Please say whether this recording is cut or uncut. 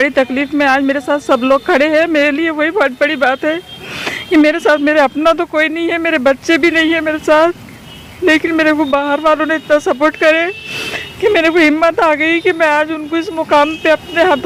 uncut